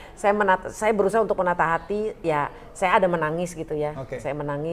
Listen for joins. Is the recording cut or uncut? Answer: uncut